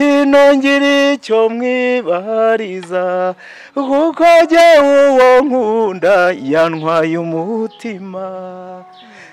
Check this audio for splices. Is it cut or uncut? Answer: uncut